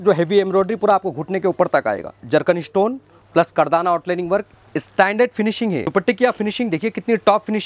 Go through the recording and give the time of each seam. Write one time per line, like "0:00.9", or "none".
0:02.2
0:05.9